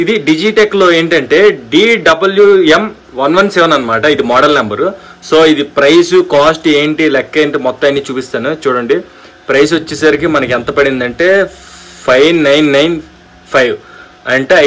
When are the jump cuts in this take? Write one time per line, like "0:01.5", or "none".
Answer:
none